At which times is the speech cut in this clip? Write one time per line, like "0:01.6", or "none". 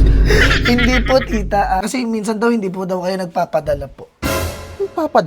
0:01.8

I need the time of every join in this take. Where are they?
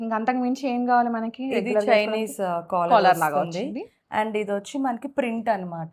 none

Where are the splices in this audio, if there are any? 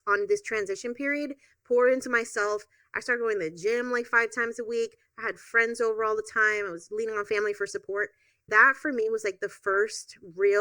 0:08.5

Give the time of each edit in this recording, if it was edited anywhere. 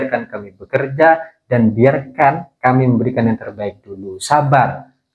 none

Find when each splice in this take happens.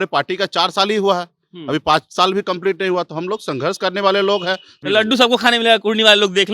0:04.7

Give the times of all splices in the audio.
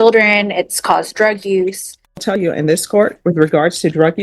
0:02.3

